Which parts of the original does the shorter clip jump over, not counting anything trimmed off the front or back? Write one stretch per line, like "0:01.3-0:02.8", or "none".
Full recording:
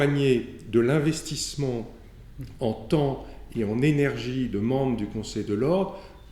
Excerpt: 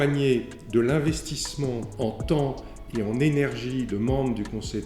0:01.9-0:02.5

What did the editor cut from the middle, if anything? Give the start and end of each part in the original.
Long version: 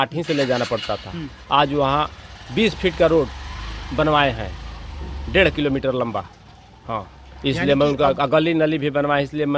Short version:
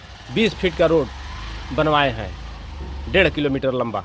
none

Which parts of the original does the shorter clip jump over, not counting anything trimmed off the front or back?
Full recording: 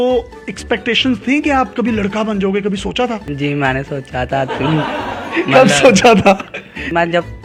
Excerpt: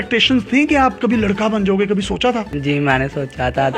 none

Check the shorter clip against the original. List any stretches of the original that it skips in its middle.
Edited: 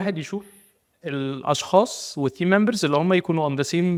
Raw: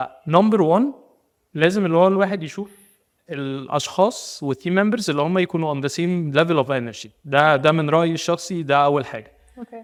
none

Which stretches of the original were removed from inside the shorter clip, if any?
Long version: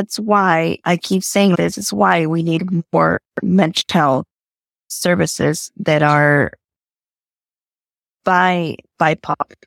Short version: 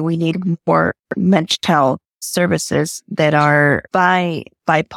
0:04.4-0:04.8
0:06.5-0:08.2

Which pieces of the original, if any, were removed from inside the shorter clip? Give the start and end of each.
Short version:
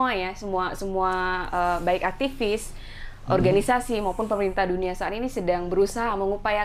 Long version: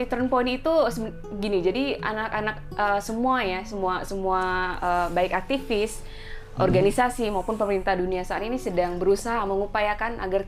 none

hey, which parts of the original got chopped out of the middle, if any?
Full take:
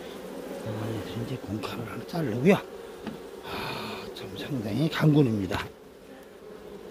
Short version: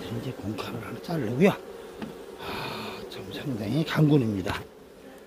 none

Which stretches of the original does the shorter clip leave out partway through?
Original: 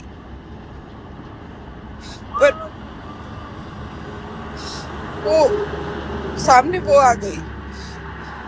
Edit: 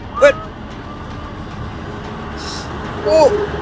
none

